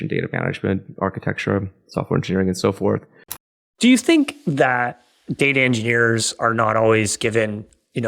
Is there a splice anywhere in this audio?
yes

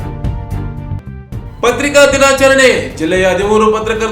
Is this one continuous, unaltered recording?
no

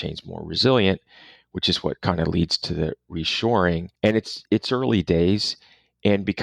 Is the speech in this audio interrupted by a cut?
yes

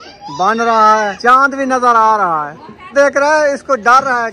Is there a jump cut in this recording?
yes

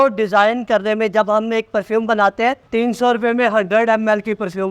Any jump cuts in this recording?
yes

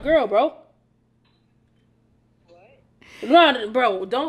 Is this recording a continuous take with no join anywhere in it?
yes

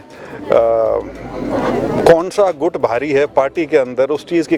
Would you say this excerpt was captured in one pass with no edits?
yes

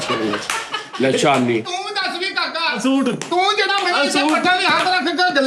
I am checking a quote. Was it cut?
yes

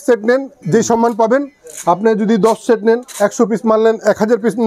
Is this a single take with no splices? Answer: yes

